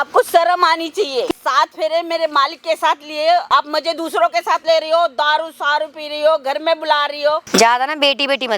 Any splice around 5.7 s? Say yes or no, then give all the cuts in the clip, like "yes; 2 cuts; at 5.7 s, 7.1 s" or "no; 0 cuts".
no; 3 cuts; at 1.3 s, 3.5 s, 7.4 s